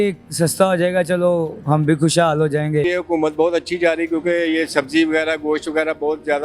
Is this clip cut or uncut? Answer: cut